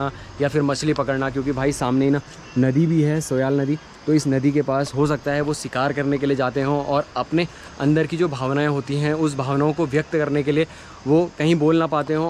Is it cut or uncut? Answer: uncut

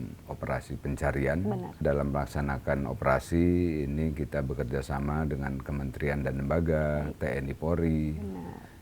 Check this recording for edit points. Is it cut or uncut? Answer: cut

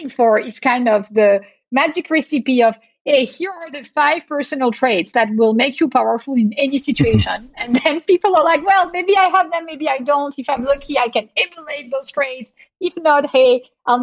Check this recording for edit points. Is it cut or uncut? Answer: uncut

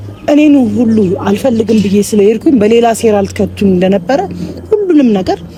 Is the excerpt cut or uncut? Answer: uncut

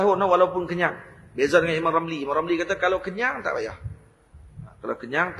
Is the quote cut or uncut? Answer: uncut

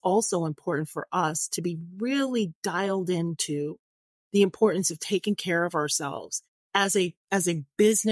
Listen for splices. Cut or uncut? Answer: uncut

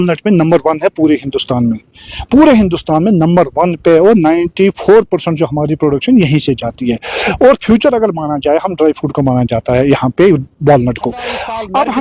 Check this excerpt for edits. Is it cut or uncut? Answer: uncut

